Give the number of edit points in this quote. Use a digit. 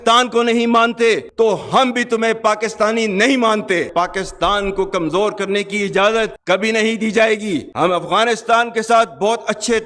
3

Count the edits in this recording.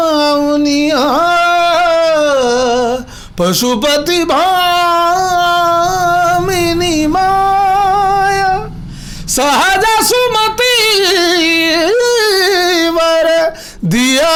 0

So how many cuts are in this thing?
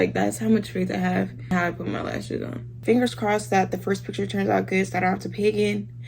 2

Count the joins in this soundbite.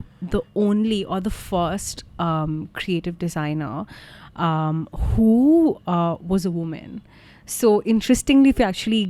0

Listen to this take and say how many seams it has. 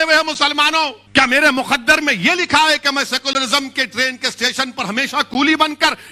1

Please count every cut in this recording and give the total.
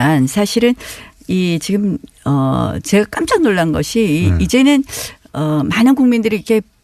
1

